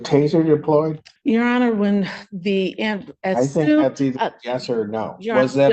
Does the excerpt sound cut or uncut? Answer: cut